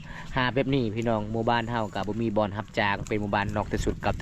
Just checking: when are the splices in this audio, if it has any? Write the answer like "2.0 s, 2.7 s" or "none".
none